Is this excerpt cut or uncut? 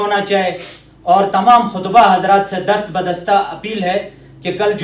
uncut